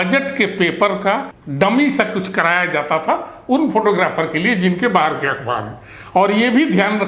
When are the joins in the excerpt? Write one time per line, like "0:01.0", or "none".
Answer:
0:01.4